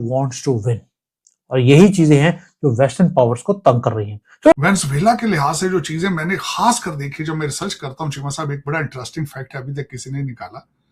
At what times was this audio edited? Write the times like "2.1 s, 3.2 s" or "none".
4.5 s